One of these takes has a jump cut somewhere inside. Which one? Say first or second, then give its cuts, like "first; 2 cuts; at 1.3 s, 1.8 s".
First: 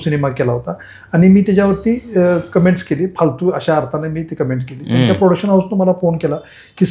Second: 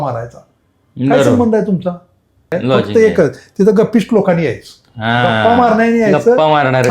second; 1 cut; at 2.5 s